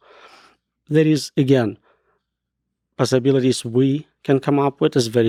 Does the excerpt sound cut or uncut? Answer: uncut